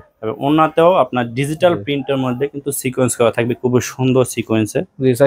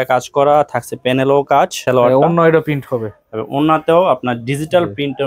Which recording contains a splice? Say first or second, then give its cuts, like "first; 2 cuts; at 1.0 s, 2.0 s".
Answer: second; 1 cut; at 1.8 s